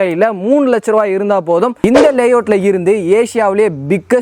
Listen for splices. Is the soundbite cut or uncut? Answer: cut